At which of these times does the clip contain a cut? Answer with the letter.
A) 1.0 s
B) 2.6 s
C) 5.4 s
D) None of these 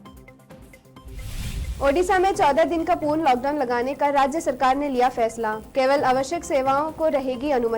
A